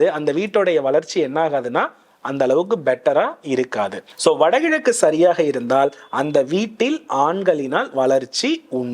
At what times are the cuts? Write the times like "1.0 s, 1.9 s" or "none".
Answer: 4.0 s